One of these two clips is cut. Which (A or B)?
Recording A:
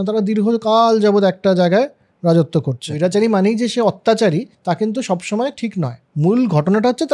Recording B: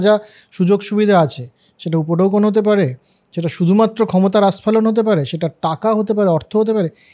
A